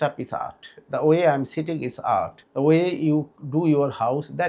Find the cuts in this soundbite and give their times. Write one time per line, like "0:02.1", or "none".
0:02.4